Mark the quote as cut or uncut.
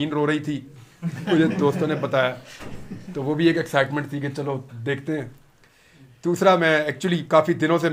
uncut